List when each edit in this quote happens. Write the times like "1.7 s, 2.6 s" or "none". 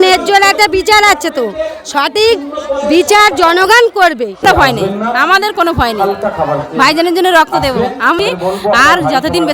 4.4 s, 8.2 s